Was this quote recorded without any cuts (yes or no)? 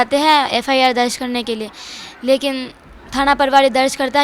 yes